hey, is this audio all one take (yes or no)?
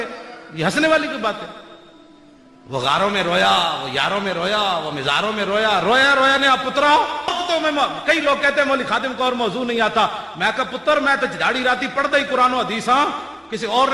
no